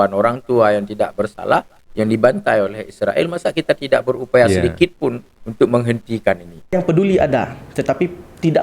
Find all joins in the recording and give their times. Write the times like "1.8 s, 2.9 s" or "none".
6.7 s